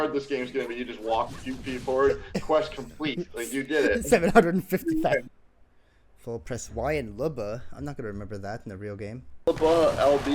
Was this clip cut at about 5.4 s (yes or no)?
yes